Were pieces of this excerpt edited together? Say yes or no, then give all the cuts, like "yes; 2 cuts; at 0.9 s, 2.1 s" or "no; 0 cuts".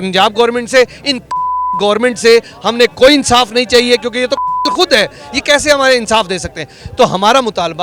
no; 0 cuts